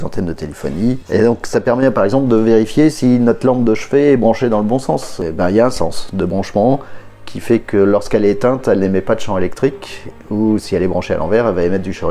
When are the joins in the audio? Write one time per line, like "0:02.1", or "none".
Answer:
0:01.0
0:05.2